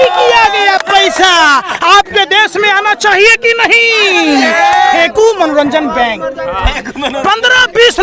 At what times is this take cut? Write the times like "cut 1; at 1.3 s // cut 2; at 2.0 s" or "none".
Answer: cut 1; at 4.9 s